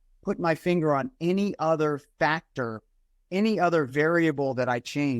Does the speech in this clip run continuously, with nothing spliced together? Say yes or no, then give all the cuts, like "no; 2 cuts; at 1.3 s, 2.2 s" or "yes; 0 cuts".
yes; 0 cuts